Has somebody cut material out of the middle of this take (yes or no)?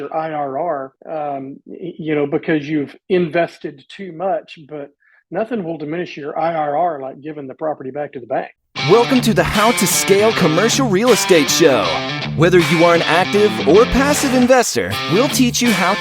yes